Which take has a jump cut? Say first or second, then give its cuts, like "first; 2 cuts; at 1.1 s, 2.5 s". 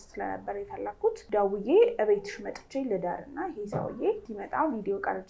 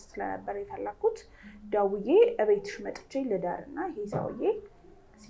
first; 2 cuts; at 1.2 s, 4.3 s